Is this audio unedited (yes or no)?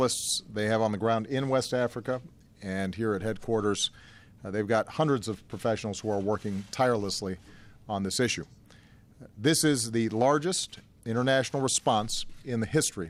yes